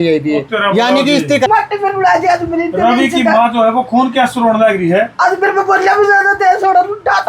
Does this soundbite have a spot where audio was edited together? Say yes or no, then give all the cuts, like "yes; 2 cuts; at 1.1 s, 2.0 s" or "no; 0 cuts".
yes; 1 cut; at 1.5 s